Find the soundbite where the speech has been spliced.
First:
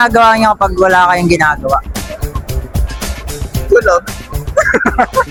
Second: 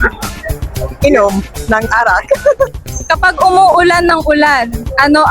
second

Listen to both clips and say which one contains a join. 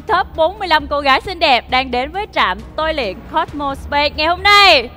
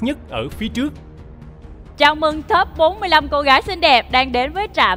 second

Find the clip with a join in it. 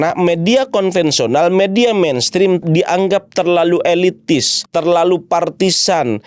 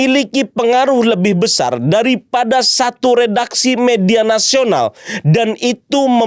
first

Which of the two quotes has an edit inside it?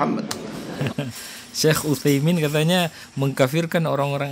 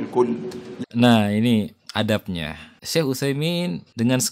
second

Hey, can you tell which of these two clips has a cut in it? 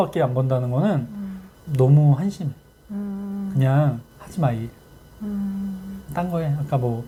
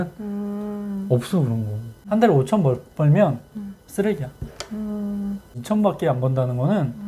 second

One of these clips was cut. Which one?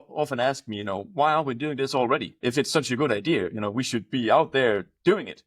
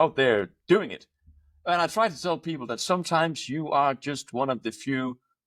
first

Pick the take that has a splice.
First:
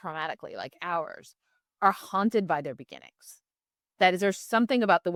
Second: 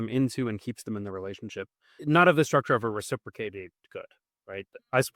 second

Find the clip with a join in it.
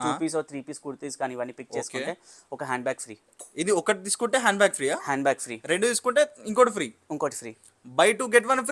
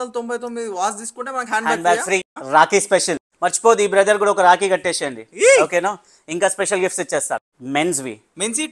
second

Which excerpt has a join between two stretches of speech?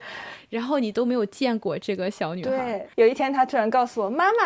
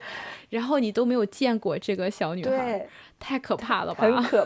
first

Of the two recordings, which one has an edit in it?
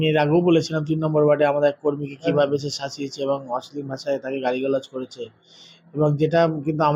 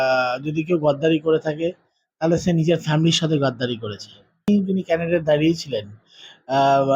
second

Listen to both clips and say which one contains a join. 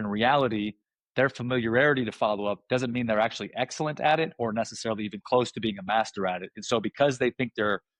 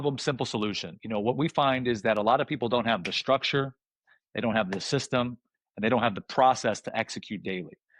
second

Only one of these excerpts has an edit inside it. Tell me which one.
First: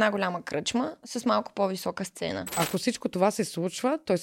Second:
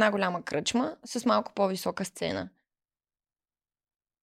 first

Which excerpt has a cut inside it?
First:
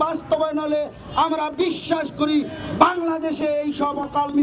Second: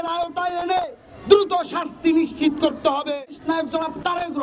second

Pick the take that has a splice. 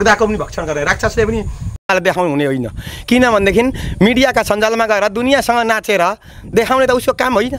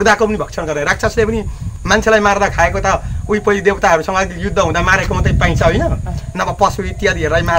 first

